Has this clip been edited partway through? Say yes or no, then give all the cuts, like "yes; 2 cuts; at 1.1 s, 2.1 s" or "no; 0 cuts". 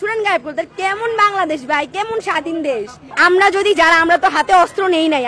yes; 1 cut; at 3.0 s